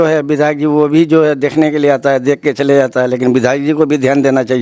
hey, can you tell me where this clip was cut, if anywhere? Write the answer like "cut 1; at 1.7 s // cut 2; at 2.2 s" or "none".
none